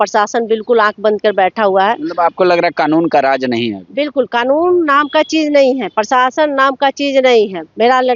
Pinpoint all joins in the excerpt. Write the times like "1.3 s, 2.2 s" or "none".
none